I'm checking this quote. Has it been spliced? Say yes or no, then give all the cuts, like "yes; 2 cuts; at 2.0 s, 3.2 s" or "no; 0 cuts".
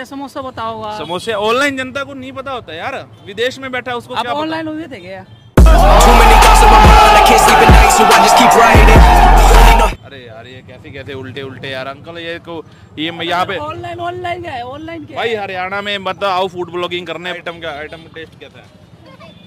yes; 1 cut; at 17.3 s